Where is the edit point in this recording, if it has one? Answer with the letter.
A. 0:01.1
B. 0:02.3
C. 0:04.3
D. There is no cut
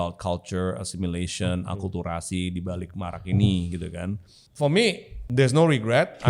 C